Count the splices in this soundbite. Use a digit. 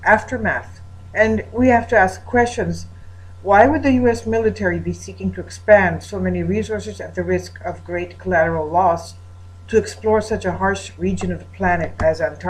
1